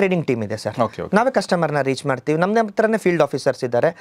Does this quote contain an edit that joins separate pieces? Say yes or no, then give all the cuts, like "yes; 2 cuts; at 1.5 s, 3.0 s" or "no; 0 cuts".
no; 0 cuts